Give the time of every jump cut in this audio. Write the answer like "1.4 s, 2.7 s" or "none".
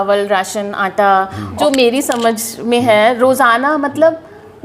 1.5 s